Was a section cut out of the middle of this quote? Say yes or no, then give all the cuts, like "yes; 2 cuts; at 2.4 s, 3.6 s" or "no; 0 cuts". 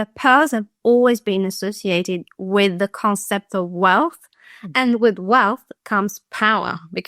no; 0 cuts